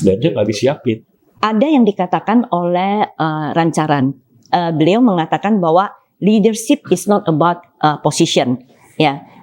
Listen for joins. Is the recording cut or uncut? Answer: cut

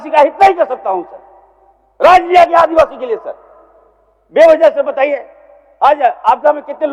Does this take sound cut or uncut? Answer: uncut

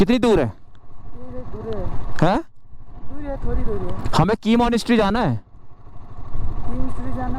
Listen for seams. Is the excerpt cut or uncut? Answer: uncut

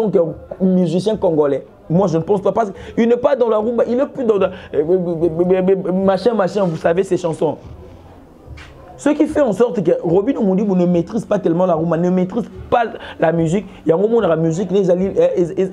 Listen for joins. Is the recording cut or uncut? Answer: uncut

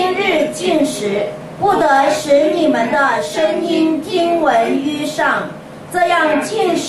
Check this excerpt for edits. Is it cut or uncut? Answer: uncut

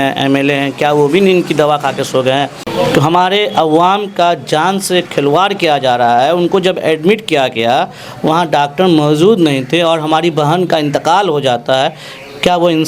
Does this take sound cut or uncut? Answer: cut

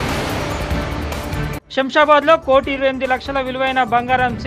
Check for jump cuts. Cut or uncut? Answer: uncut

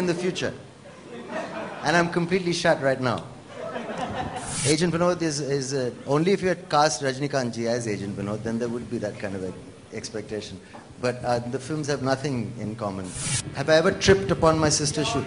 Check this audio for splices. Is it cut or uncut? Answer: cut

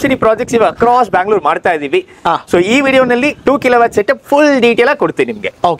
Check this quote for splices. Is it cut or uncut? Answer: uncut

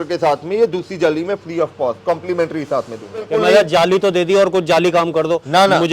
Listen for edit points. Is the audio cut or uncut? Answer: cut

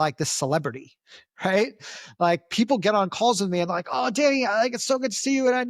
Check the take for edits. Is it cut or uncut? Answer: uncut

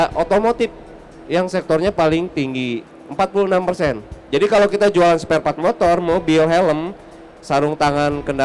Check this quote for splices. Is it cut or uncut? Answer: uncut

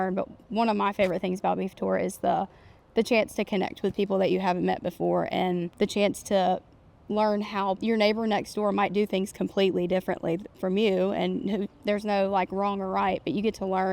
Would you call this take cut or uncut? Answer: cut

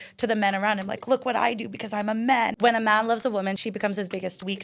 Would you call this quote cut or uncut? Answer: cut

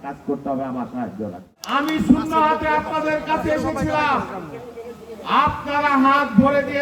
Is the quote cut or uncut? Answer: cut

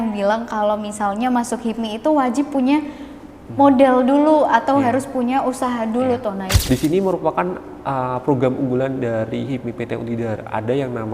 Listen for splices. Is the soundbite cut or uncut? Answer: cut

